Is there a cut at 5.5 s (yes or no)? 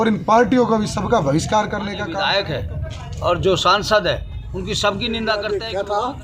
yes